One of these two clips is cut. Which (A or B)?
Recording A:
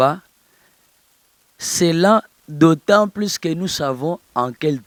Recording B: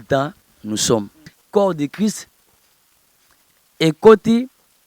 B